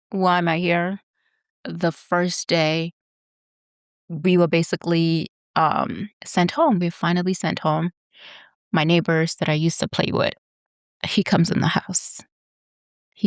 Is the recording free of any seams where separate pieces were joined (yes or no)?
no